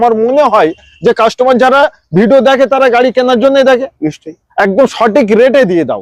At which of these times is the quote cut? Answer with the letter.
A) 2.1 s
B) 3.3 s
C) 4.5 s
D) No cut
D